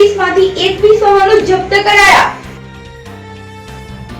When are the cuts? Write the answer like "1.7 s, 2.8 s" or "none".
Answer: 2.6 s